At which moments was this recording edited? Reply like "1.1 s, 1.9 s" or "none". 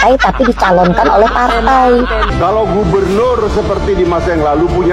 2.3 s